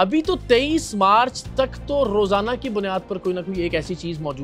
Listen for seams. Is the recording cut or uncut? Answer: uncut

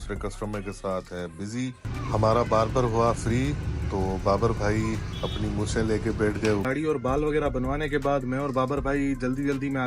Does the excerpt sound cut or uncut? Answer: cut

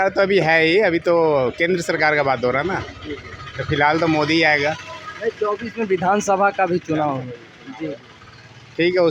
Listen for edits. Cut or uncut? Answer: uncut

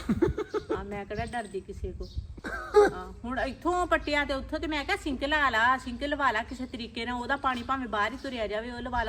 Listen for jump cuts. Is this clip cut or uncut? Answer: cut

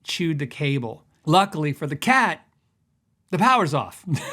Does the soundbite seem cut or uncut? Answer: cut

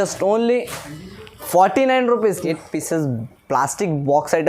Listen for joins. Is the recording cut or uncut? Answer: cut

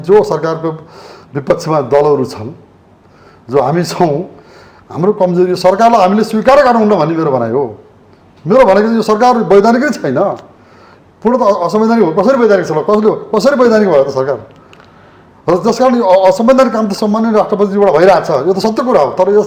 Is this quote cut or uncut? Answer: uncut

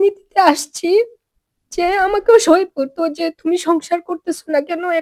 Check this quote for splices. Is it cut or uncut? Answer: uncut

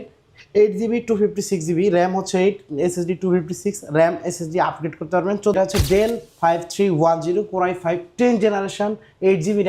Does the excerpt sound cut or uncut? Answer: cut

